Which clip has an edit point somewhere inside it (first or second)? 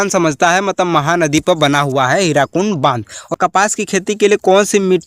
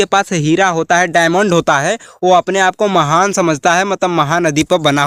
first